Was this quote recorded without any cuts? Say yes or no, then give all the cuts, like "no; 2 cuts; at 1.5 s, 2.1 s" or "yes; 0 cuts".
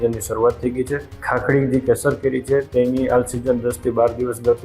no; 1 cut; at 1.1 s